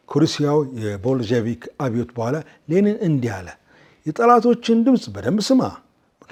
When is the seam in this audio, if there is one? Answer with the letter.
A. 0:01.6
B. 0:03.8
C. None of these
C